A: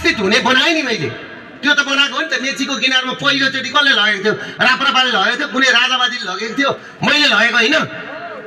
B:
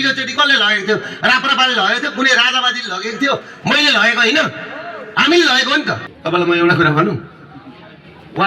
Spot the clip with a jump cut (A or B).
B